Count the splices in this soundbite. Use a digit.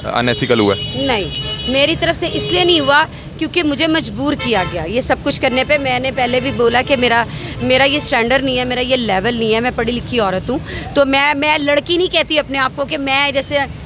0